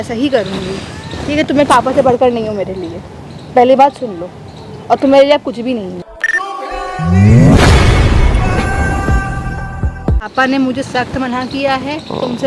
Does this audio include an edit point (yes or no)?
yes